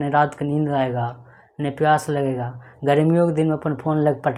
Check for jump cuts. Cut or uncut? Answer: uncut